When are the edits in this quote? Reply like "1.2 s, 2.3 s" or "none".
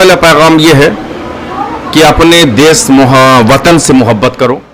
none